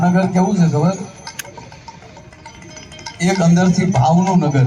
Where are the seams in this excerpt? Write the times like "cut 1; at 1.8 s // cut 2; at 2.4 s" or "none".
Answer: none